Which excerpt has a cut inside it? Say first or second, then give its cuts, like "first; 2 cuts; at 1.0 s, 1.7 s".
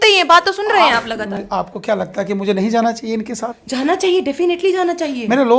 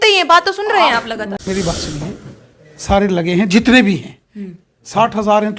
second; 1 cut; at 1.5 s